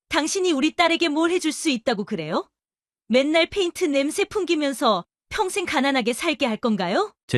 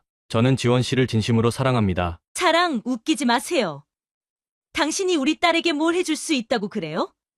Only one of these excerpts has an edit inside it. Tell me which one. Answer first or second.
second